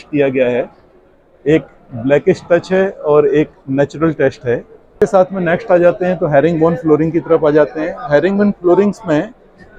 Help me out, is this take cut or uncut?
cut